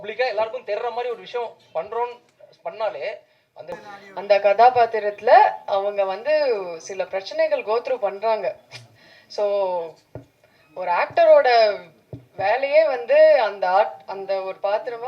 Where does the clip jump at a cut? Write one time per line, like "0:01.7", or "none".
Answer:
0:03.9